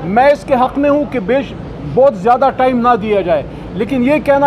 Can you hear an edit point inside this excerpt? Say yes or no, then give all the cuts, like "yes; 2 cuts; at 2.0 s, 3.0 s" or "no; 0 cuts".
no; 0 cuts